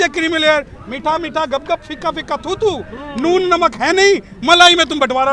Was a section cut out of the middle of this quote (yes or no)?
no